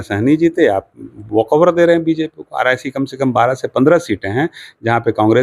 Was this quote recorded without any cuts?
yes; 0 cuts

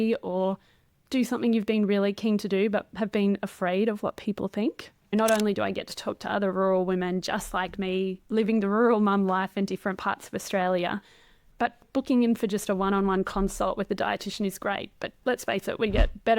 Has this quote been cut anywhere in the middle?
yes; 2 cuts; at 5.1 s, 11.8 s

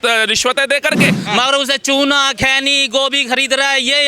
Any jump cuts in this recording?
yes; 1 cut; at 1.2 s

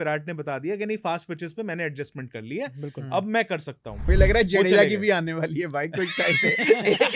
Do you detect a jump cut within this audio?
yes; 1 cut; at 4.0 s

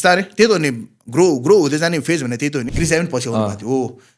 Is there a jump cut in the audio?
yes; 1 cut; at 2.7 s

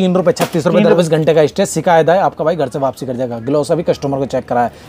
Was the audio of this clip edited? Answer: yes; 1 cut; at 1.0 s

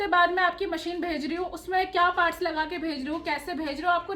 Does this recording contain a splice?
no; 0 cuts

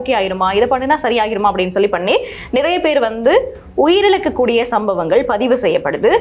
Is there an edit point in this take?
no; 0 cuts

